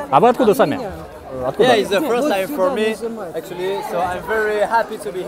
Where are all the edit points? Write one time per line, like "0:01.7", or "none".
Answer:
0:01.3